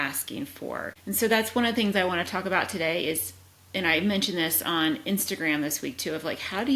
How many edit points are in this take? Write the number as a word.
one